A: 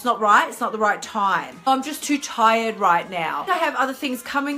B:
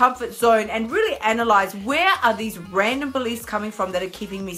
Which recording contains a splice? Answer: A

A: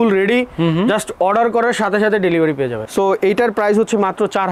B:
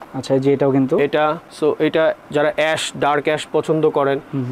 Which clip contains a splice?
A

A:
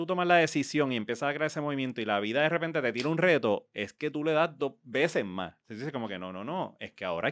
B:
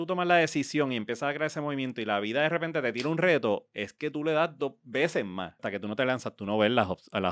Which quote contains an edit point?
B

